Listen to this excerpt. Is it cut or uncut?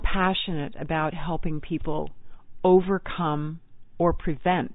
uncut